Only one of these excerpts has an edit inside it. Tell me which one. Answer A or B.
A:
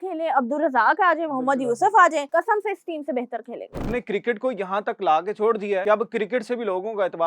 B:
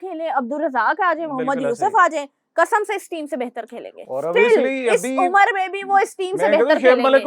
A